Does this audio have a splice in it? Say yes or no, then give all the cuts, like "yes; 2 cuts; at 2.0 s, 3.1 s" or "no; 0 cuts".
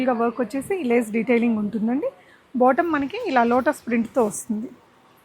no; 0 cuts